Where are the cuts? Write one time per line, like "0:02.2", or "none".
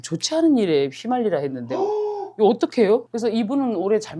0:03.0